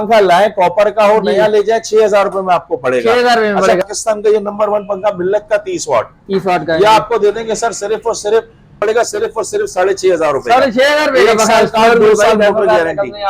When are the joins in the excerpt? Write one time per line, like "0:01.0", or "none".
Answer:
0:03.8
0:08.8